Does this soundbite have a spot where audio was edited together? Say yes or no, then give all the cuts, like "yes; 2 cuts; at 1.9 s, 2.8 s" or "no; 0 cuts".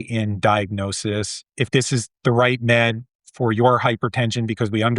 yes; 1 cut; at 1.5 s